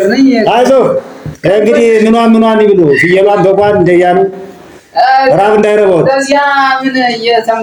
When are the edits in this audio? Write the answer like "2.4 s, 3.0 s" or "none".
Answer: none